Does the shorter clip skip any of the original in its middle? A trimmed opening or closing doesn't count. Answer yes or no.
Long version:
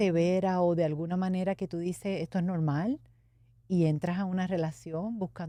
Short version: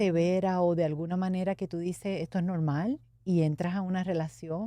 yes